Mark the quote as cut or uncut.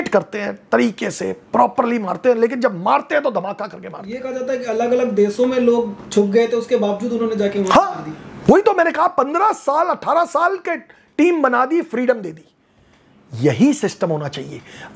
uncut